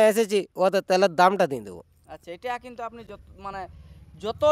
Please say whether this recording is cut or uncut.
uncut